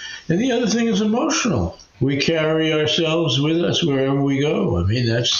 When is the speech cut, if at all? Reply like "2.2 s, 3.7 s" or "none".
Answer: 1.8 s

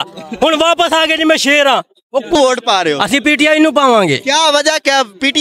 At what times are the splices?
2.3 s

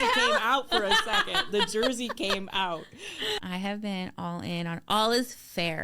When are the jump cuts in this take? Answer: 3.4 s

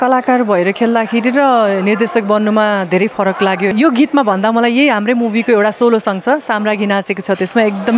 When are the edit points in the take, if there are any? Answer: 3.7 s

